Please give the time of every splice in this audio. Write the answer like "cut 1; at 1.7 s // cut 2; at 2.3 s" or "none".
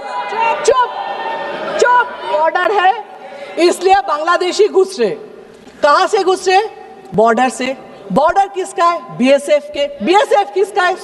cut 1; at 2.3 s